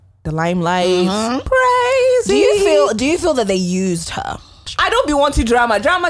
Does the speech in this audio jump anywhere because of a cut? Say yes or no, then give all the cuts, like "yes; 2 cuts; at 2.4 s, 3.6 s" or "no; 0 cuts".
yes; 2 cuts; at 1.4 s, 4.7 s